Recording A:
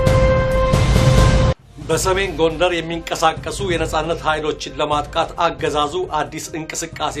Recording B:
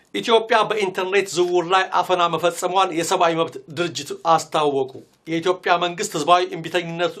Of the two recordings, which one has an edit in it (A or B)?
A